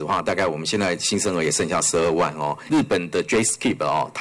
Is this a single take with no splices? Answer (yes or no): no